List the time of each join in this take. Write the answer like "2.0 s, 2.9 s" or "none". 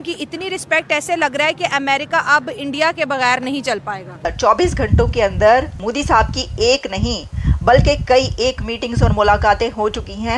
4.2 s, 5.8 s